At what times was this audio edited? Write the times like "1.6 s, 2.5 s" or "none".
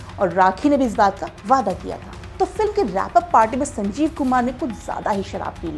2.2 s